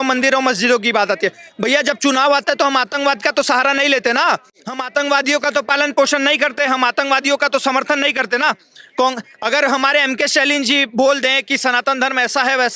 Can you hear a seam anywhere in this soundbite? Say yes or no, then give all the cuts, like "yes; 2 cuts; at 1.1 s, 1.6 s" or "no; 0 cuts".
no; 0 cuts